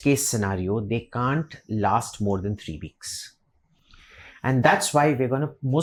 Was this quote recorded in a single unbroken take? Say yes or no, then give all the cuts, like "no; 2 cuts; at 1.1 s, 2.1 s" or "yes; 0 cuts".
yes; 0 cuts